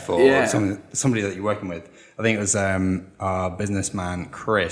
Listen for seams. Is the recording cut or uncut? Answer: cut